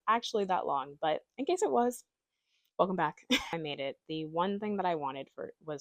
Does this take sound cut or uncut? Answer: cut